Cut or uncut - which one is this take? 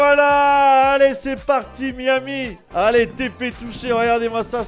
cut